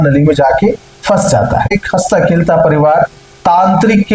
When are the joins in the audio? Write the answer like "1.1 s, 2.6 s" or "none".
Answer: 1.8 s